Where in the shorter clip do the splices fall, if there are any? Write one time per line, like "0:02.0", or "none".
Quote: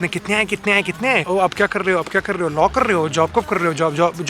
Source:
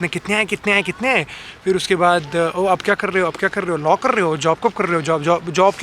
0:01.2